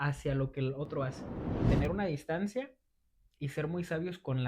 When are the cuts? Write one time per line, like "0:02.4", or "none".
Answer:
0:01.6